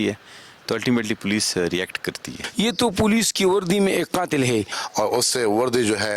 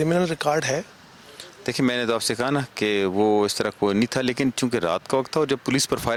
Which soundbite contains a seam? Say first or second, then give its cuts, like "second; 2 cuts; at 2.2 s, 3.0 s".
first; 2 cuts; at 2.4 s, 4.8 s